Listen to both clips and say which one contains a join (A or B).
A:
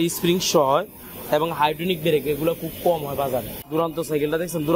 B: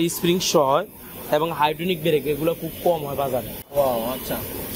A